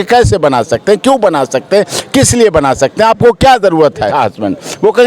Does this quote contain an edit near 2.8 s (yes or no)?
no